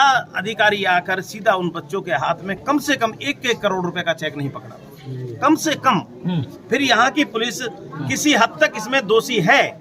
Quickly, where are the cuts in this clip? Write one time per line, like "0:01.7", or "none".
0:06.1